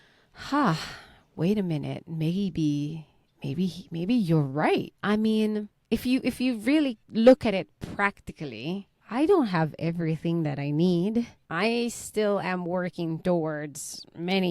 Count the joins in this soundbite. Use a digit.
5